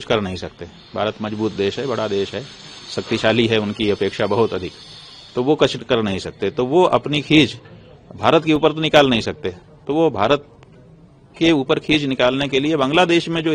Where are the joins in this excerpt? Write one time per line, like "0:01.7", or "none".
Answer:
none